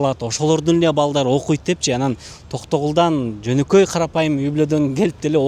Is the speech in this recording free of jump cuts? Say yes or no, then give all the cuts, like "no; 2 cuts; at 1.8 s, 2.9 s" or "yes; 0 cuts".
yes; 0 cuts